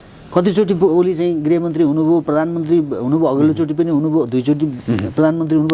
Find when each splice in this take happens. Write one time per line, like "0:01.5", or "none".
none